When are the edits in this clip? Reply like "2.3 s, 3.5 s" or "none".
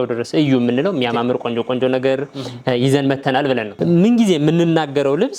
3.7 s

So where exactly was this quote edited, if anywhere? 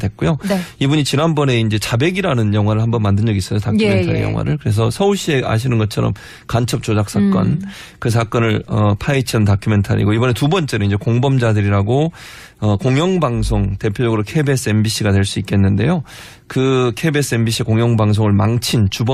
none

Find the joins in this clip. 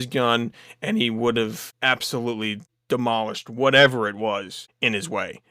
1.7 s, 2.7 s, 4.6 s

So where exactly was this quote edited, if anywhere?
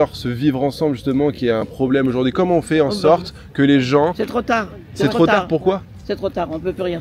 none

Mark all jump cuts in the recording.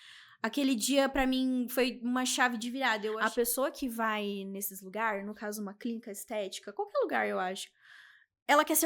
3.2 s

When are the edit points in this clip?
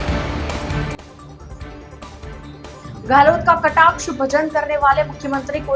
2.4 s

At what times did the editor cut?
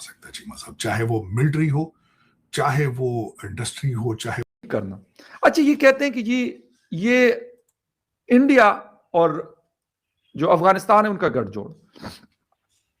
4.5 s

